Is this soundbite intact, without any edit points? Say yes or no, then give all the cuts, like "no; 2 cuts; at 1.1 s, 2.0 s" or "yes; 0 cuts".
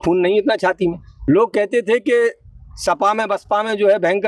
no; 1 cut; at 1.1 s